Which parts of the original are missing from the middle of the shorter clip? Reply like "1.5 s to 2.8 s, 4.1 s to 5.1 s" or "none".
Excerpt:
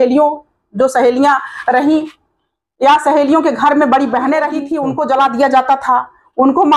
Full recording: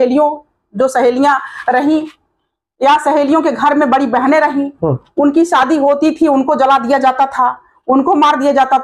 4.7 s to 6.2 s